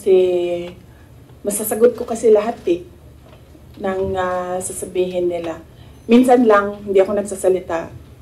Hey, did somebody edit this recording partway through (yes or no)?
no